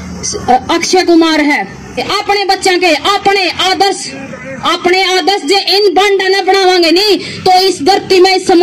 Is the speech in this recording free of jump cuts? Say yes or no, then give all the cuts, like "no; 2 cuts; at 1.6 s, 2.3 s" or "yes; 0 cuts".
no; 1 cut; at 2.1 s